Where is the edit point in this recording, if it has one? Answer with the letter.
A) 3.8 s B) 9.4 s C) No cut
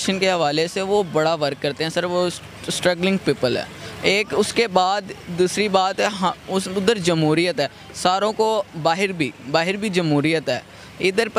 C